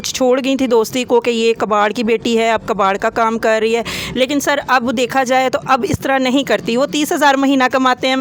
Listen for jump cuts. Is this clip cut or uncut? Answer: uncut